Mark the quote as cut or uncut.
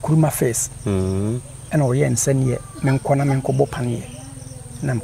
uncut